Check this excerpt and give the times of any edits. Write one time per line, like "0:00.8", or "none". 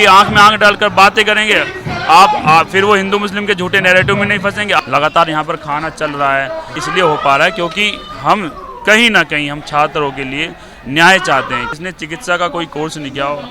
0:04.8
0:06.8
0:11.7